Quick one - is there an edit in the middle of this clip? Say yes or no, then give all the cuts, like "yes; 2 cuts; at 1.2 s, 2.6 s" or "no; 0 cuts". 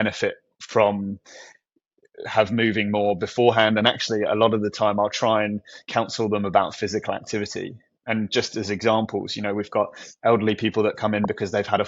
no; 0 cuts